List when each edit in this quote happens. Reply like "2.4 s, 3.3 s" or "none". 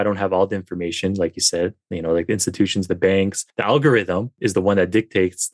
3.5 s, 4.3 s